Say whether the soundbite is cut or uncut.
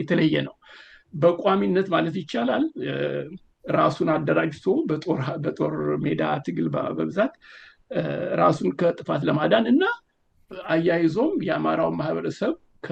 uncut